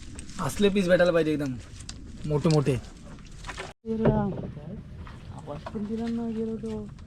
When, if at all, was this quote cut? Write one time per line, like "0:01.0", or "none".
0:03.8